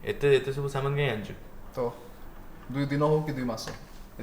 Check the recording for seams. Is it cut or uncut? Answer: uncut